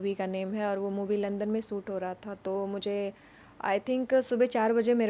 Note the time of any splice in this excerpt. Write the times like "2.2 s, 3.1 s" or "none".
none